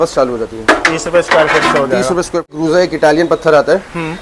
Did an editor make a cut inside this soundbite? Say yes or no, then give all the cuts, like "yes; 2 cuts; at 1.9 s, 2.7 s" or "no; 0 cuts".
yes; 1 cut; at 2.5 s